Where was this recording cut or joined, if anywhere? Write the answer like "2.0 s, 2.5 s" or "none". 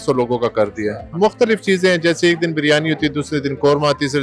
1.0 s